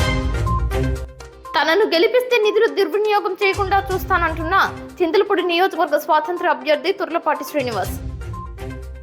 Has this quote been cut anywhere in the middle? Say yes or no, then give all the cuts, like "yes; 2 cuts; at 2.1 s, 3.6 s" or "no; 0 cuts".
yes; 1 cut; at 1.2 s